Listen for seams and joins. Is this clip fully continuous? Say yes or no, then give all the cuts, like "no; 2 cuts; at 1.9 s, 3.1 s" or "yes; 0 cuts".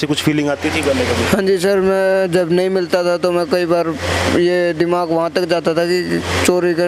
yes; 0 cuts